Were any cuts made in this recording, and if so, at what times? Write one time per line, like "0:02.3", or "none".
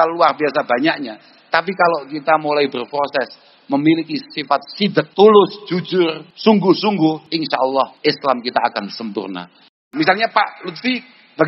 0:05.1
0:06.2
0:07.6
0:09.8